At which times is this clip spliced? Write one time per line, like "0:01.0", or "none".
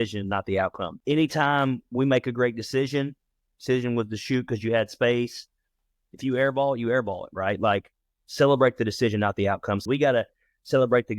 0:00.9
0:09.8